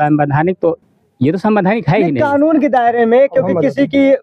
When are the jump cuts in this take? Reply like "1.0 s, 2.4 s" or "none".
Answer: none